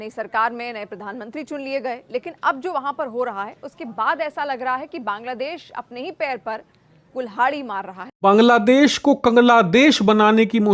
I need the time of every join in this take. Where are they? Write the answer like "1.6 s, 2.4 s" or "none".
8.0 s

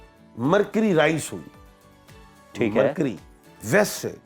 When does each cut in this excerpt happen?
none

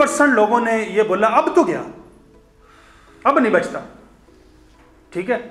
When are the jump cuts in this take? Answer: none

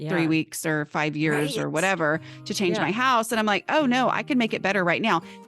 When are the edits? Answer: none

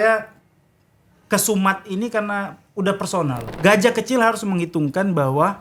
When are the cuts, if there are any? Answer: 3.4 s

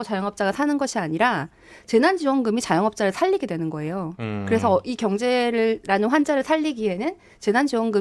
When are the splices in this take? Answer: none

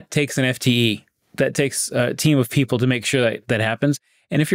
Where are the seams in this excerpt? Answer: none

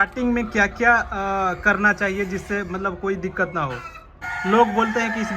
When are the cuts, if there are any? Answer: 4.2 s

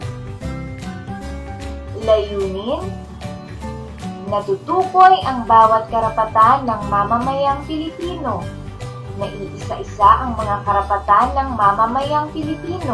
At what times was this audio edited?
1.9 s, 2.9 s, 4.2 s

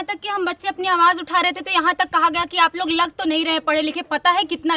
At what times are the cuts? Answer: none

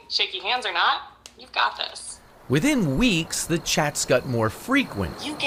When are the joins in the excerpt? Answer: none

